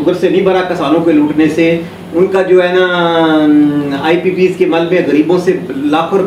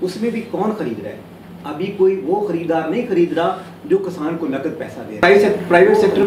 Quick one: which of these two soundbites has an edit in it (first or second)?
second